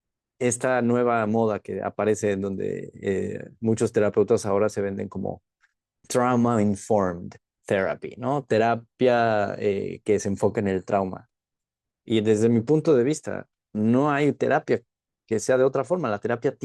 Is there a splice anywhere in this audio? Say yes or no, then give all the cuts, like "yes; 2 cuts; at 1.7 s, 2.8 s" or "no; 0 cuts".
yes; 1 cut; at 6.1 s